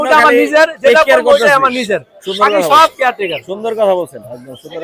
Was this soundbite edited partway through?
no; 0 cuts

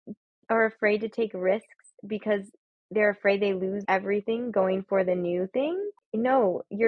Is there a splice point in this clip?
yes; 1 cut; at 6.0 s

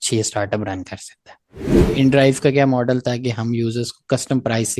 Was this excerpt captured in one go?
no; 1 cut; at 1.9 s

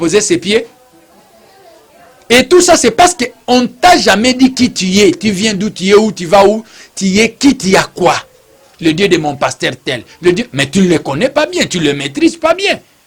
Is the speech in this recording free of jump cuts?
no; 2 cuts; at 1.9 s, 8.7 s

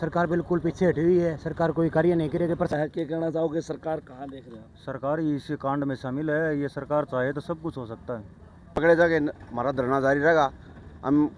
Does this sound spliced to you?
yes; 2 cuts; at 2.7 s, 8.8 s

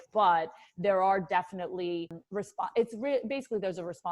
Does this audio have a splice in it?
yes; 1 cut; at 2.2 s

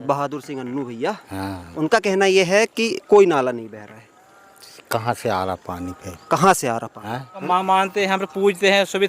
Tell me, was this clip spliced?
yes; 1 cut; at 7.3 s

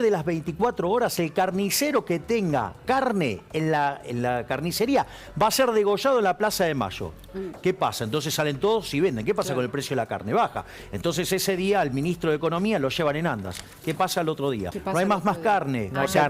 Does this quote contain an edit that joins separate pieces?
yes; 1 cut; at 14.7 s

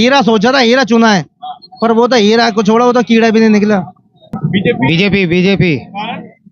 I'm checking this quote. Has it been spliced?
yes; 1 cut; at 4.3 s

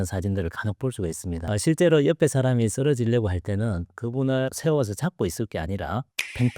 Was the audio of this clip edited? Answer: yes; 1 cut; at 1.4 s

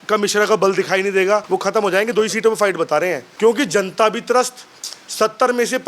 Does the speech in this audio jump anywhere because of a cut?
yes; 2 cuts; at 1.4 s, 3.2 s

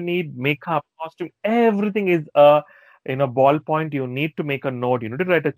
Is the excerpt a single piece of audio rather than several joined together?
yes; 0 cuts

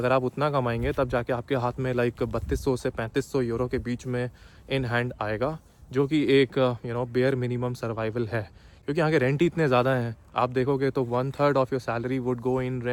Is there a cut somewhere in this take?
no; 0 cuts

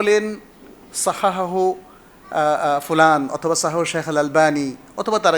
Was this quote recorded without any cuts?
yes; 0 cuts

